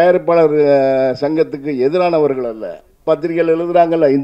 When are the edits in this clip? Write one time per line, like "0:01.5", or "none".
0:03.0